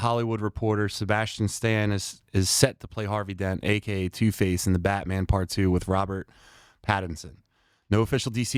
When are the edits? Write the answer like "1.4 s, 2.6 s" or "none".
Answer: none

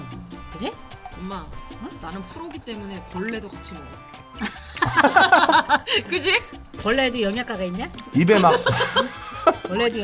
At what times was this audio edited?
6.8 s

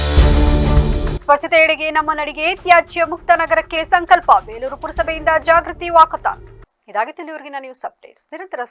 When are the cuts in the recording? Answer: none

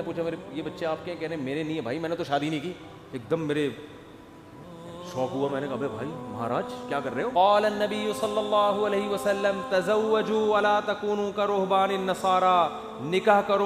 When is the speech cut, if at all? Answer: 7.3 s

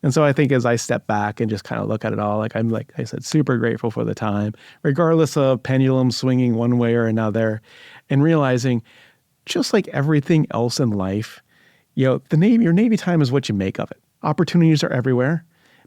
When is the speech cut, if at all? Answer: 14.1 s

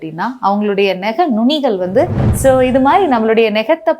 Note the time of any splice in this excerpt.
2.3 s

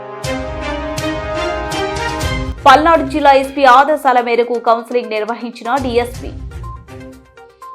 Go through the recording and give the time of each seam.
2.3 s

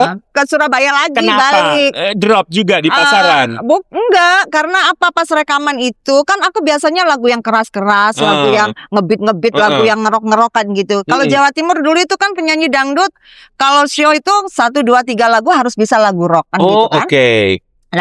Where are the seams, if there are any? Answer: none

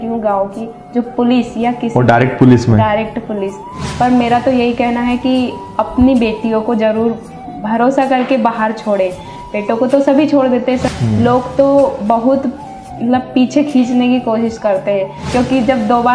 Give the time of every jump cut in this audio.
3.8 s, 10.8 s, 15.3 s

